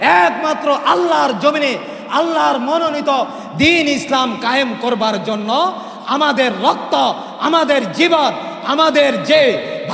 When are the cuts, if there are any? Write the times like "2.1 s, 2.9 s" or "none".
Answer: none